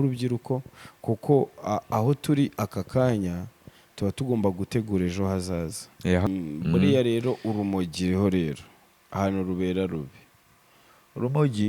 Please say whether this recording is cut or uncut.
cut